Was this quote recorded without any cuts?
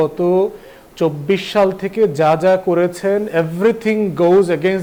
yes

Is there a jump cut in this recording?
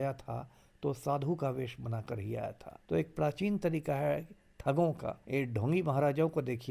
yes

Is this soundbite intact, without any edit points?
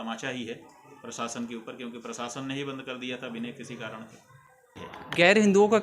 no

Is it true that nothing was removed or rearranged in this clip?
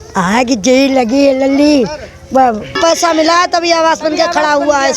no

